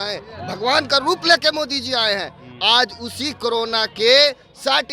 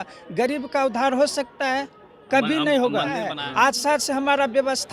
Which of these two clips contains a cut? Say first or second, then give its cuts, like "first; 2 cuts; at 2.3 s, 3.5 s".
second; 1 cut; at 3.3 s